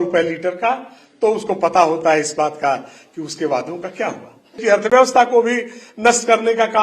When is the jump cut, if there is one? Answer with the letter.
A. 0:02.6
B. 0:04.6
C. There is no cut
B